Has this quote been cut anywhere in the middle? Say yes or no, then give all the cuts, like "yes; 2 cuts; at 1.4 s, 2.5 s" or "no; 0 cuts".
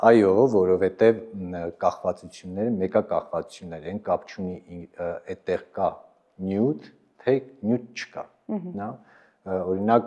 no; 0 cuts